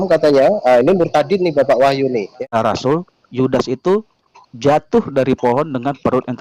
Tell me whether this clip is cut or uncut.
cut